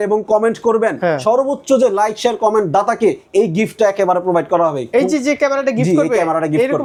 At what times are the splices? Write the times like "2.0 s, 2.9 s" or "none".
none

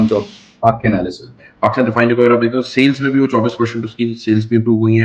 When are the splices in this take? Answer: 1.4 s

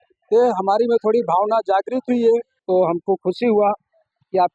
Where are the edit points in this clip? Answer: 2.5 s

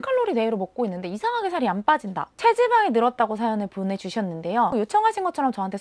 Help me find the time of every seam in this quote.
4.7 s

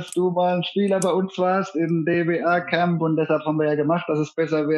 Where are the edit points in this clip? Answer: none

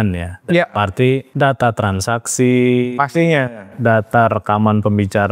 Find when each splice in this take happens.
1.3 s

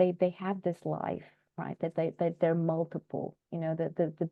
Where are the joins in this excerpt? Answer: none

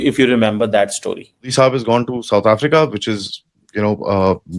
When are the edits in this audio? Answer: 1.5 s

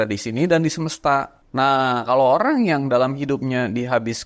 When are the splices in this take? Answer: 1.4 s

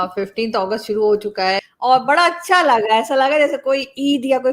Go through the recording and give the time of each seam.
1.6 s

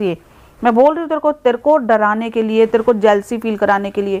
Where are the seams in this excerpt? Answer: none

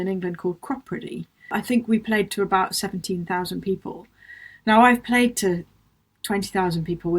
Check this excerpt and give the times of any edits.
1.4 s

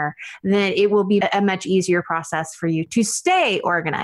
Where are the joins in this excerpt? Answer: 1.2 s, 2.9 s

